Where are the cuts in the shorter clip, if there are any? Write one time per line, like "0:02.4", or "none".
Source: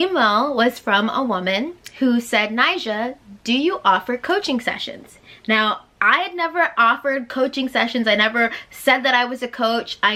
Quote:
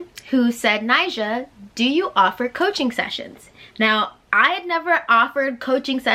none